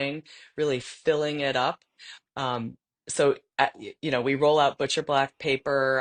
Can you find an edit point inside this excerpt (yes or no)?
no